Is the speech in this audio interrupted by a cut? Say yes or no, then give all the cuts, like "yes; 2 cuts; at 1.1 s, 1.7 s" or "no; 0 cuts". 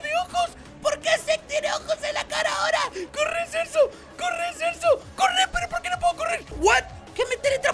yes; 1 cut; at 6.5 s